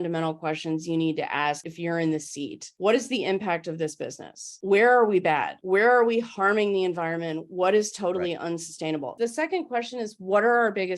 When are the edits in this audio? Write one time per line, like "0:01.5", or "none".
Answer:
0:01.7
0:02.6
0:04.5
0:05.5
0:09.1